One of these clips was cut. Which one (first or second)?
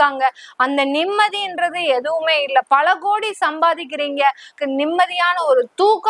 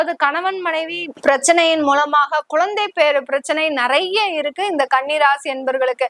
first